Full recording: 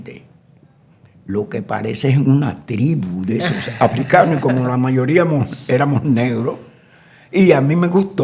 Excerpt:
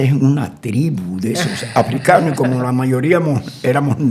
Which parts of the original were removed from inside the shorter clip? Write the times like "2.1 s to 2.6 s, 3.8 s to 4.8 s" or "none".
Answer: none